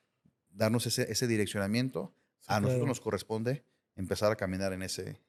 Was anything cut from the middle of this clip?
no; 0 cuts

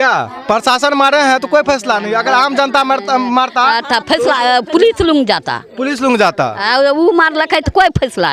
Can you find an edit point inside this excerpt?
no; 0 cuts

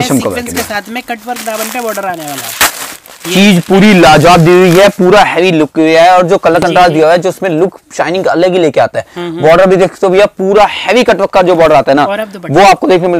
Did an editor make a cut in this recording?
no; 0 cuts

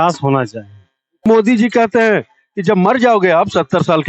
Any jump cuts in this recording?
yes; 1 cut; at 1.2 s

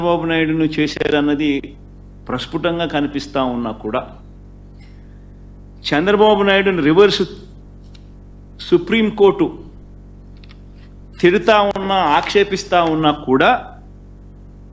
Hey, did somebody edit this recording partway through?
yes; 1 cut; at 13.8 s

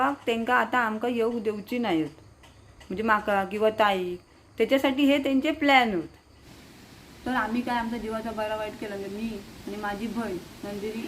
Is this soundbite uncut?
no; 1 cut; at 6.8 s

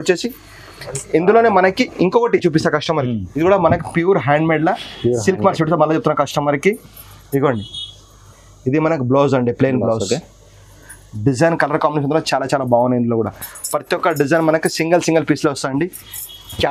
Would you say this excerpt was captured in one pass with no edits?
no; 1 cut; at 3.3 s

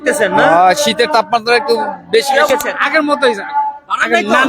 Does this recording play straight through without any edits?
no; 1 cut; at 2.5 s

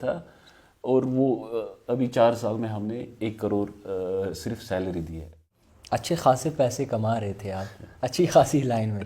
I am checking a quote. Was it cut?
yes; 1 cut; at 5.4 s

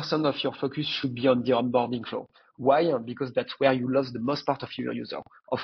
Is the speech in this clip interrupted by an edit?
no; 0 cuts

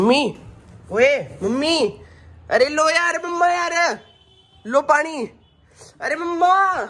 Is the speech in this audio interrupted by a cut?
no; 0 cuts

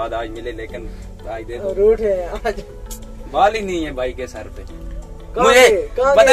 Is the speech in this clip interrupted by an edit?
no; 0 cuts

